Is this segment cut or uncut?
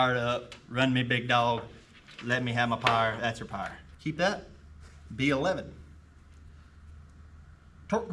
cut